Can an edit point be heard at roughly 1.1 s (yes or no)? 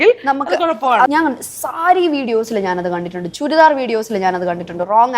yes